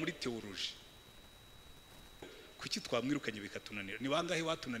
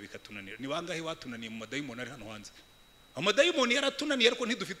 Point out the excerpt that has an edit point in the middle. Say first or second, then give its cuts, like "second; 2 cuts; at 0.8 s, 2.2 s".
first; 1 cut; at 2.4 s